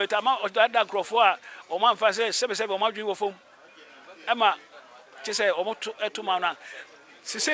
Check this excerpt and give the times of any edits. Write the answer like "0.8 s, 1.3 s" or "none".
none